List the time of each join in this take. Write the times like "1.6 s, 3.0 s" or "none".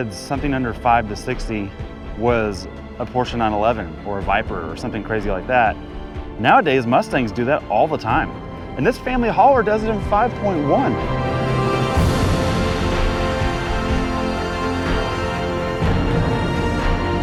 none